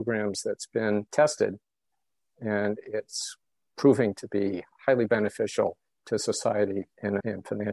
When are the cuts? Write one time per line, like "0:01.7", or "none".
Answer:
0:04.7

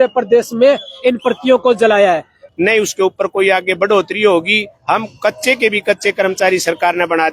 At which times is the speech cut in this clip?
0:02.3

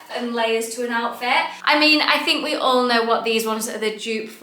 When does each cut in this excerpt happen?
0:01.5

